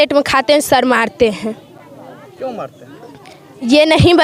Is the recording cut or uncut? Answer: uncut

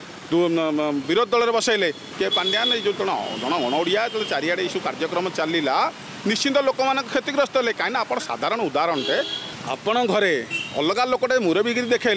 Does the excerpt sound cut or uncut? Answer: cut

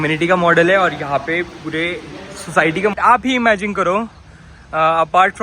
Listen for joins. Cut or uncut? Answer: cut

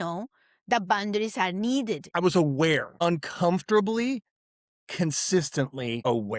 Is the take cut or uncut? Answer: cut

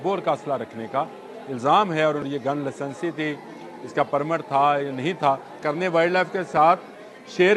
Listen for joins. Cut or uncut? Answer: cut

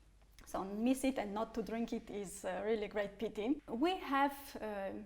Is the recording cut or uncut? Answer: cut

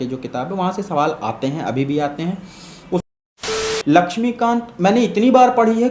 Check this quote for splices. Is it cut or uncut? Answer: cut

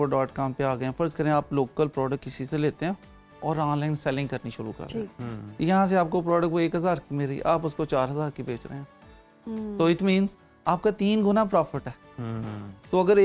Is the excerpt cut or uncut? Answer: uncut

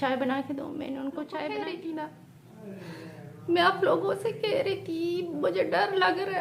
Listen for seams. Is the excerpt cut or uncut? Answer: cut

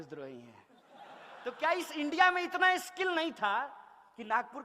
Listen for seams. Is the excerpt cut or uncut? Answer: cut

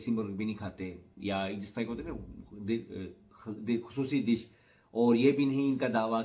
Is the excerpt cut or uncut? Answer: uncut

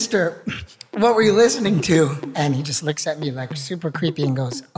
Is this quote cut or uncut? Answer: uncut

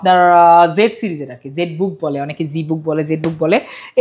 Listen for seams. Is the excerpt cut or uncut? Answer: uncut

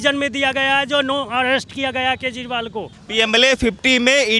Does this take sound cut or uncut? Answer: cut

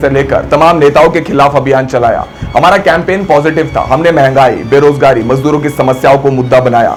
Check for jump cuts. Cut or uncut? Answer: uncut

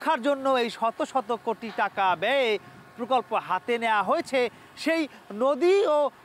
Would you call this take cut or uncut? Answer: uncut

